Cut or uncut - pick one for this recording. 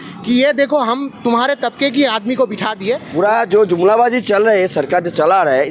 cut